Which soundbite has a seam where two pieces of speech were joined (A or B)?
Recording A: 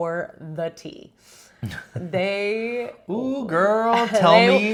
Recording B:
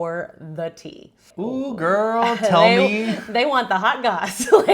B